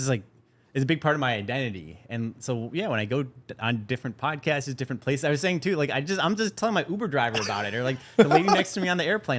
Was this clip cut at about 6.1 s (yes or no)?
no